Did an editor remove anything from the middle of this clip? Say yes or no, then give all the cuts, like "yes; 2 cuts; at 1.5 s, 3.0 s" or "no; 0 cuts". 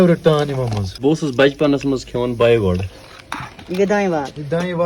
yes; 1 cut; at 3.0 s